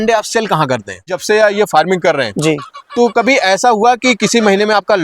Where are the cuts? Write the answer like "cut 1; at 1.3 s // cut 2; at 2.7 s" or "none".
cut 1; at 1.2 s

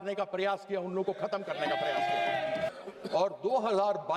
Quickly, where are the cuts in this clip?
cut 1; at 2.7 s

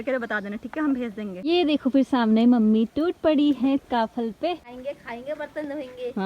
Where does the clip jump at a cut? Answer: cut 1; at 1.5 s // cut 2; at 4.7 s

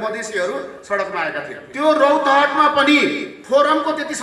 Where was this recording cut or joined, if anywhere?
cut 1; at 1.6 s // cut 2; at 3.3 s

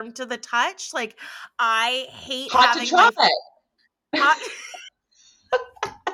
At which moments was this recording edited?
none

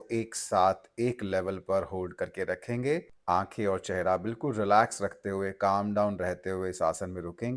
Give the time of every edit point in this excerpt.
none

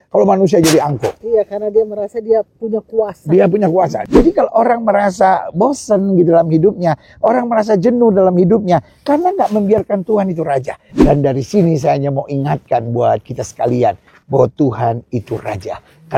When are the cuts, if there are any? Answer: cut 1; at 4.0 s // cut 2; at 10.8 s

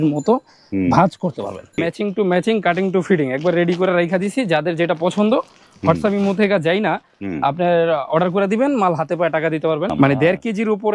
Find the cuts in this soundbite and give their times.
cut 1; at 1.8 s // cut 2; at 9.9 s

